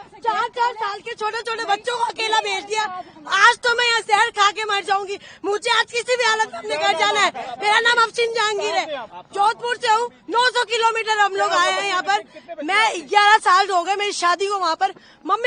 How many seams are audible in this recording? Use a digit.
0